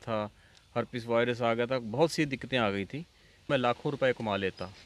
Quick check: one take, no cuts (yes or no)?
no